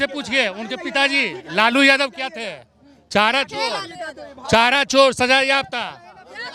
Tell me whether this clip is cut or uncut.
uncut